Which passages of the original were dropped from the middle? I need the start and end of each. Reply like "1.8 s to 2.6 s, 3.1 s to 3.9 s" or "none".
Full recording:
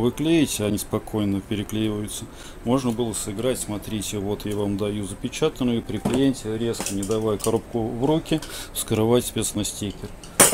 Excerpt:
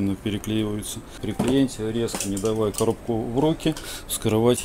2.5 s to 5.9 s